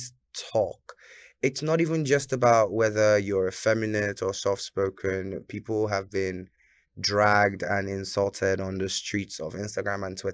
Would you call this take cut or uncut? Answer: uncut